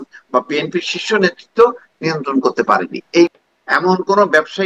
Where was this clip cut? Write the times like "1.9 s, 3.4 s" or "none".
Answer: 3.3 s